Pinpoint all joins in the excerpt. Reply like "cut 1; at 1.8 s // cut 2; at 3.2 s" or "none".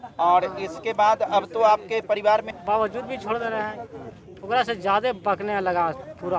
cut 1; at 2.5 s